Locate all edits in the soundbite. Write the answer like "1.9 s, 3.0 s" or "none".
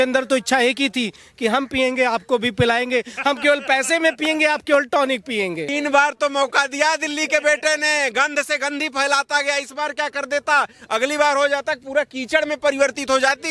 5.7 s